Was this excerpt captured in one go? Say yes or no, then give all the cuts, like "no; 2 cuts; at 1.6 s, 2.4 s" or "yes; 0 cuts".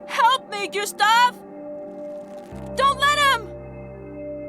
no; 1 cut; at 3.4 s